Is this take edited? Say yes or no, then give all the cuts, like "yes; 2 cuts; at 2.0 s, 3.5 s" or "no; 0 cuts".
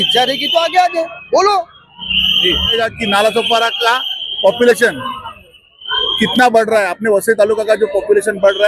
yes; 1 cut; at 2.7 s